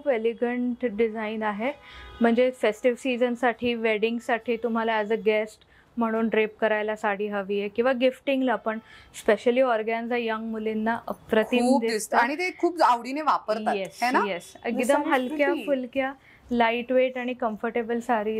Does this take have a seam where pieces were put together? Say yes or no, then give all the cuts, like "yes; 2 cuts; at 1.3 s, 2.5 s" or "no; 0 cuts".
no; 0 cuts